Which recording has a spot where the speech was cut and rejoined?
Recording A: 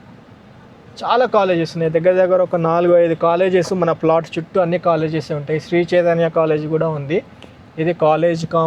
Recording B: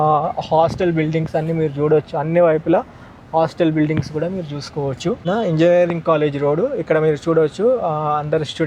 B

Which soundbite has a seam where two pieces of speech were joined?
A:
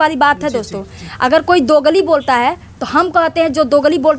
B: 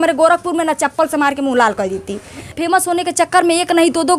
B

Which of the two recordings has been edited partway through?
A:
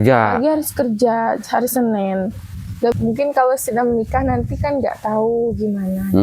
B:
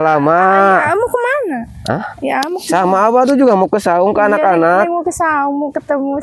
A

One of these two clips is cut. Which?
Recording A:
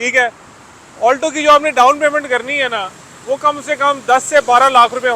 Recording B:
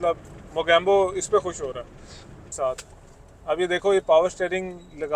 B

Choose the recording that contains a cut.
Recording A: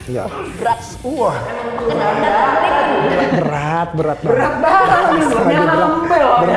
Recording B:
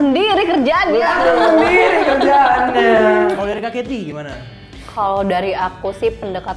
B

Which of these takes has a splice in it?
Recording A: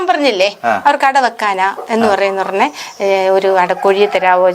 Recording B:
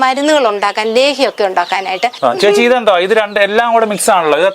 B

